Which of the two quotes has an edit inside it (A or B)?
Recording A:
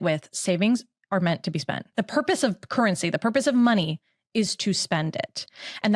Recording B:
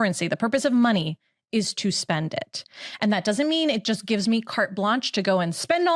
A